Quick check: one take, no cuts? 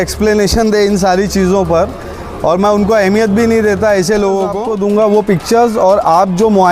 no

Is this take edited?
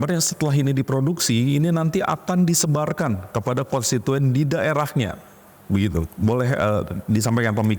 no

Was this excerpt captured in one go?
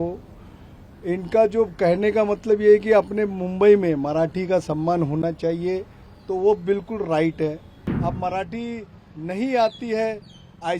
no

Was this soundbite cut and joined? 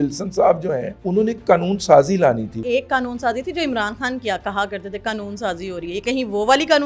yes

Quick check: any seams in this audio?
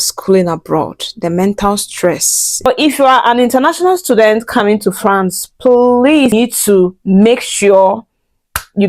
yes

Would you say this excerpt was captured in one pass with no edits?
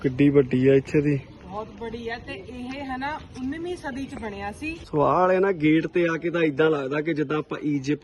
no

